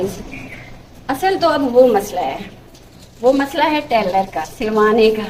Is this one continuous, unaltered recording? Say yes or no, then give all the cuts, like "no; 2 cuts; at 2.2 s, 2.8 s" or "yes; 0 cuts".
yes; 0 cuts